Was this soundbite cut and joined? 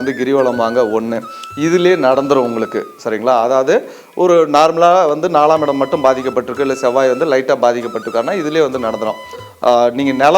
yes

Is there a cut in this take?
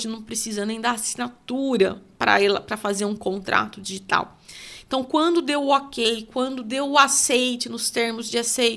no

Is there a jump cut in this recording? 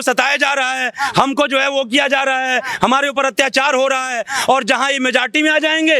no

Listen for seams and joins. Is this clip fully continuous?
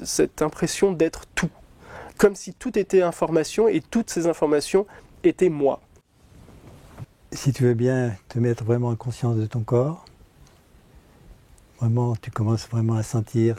no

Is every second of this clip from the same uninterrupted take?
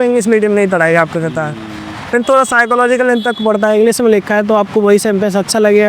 yes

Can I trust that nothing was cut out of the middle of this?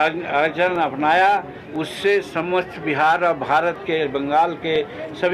yes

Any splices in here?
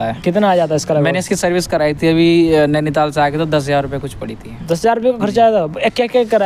no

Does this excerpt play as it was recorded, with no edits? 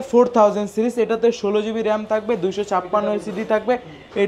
yes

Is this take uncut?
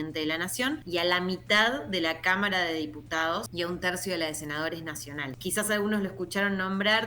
no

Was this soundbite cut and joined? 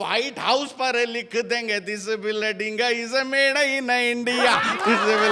no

